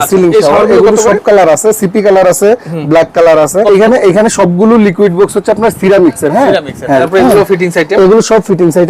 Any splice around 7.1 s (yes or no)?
yes